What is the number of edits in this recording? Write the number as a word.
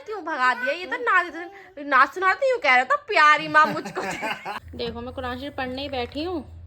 one